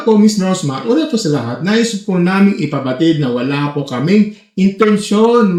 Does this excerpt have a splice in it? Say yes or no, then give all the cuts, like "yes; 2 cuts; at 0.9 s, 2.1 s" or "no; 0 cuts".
no; 0 cuts